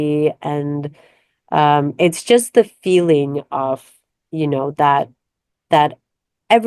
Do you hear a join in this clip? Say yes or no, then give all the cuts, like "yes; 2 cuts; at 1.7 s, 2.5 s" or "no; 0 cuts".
no; 0 cuts